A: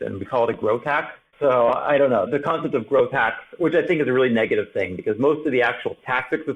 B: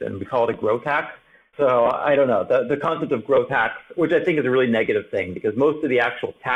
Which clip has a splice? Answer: A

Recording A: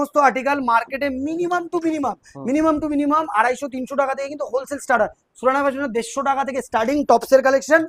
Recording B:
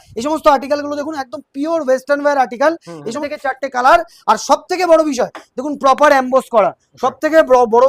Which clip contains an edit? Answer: B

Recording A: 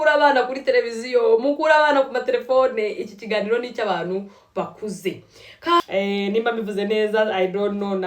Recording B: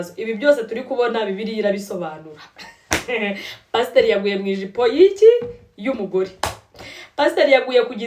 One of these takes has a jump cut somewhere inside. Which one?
A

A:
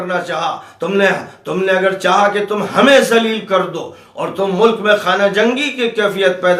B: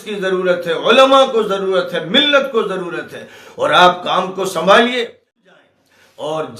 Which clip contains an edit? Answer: B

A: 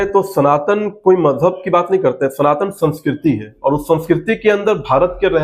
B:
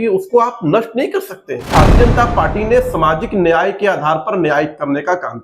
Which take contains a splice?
B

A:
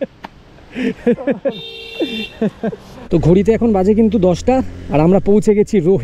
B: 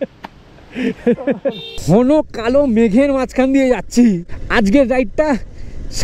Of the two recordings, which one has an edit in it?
B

